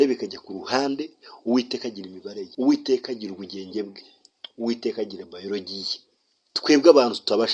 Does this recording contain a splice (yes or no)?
yes